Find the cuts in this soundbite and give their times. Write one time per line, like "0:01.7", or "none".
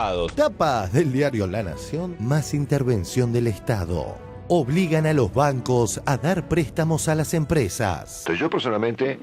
0:08.2